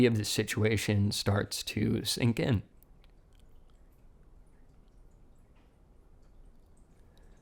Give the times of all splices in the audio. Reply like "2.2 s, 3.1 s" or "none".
2.8 s

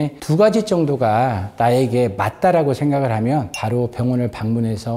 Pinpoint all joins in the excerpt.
none

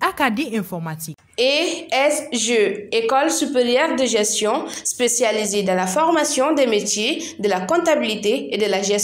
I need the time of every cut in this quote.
none

